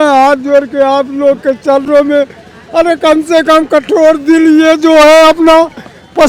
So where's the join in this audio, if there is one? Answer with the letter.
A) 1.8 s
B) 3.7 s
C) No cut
C